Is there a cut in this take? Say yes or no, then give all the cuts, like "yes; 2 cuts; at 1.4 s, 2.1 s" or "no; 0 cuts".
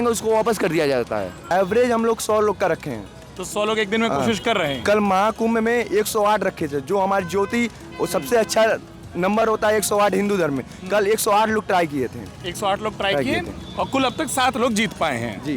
yes; 1 cut; at 1.4 s